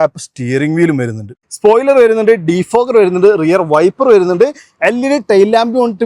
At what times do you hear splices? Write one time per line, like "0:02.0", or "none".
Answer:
0:01.4